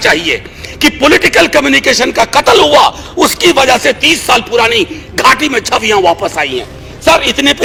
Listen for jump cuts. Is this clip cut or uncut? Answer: uncut